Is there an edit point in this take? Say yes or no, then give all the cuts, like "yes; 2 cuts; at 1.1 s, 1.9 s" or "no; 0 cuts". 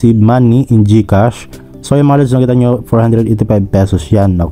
no; 0 cuts